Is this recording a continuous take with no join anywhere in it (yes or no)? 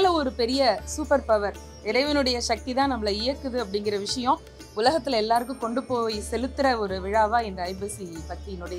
yes